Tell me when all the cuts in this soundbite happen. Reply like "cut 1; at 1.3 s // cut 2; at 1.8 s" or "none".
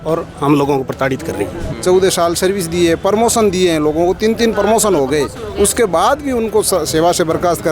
cut 1; at 1.6 s